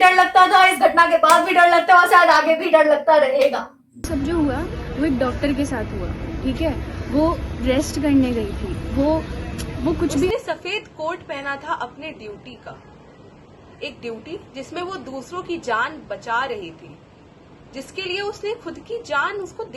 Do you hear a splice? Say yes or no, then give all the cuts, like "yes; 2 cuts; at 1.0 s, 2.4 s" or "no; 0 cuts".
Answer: yes; 2 cuts; at 4.1 s, 10.3 s